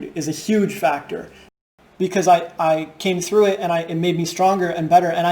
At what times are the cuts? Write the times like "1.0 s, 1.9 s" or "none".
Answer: 1.5 s